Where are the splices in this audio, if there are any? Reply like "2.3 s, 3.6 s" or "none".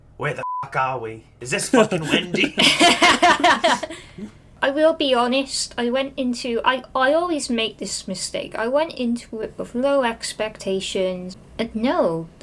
4.5 s, 11.3 s